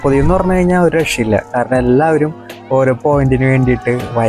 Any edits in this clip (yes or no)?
no